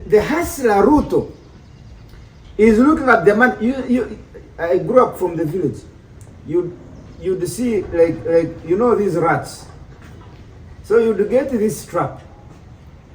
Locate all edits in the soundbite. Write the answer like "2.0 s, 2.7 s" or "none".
none